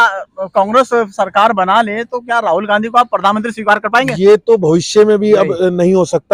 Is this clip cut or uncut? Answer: uncut